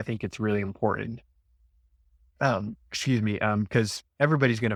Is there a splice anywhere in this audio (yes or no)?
no